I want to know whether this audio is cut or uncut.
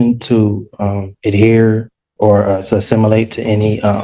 uncut